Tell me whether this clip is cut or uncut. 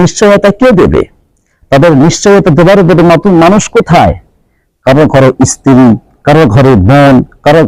uncut